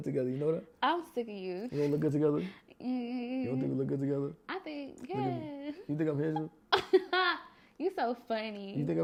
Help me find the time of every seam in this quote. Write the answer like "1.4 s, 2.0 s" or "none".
none